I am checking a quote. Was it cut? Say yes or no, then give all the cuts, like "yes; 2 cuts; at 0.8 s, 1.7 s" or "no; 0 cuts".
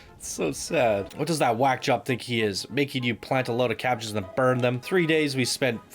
yes; 2 cuts; at 1.1 s, 4.8 s